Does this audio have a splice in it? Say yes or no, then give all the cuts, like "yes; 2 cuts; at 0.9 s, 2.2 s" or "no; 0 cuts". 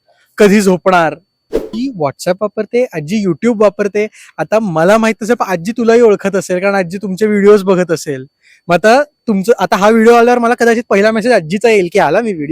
yes; 1 cut; at 1.8 s